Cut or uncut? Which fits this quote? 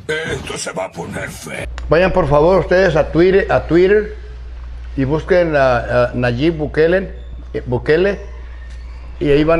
cut